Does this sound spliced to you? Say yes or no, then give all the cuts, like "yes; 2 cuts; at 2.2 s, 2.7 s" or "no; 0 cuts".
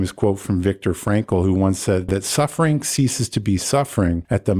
no; 0 cuts